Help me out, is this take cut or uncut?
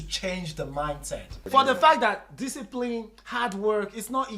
cut